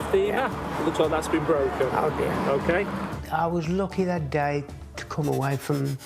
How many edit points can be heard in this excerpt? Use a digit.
1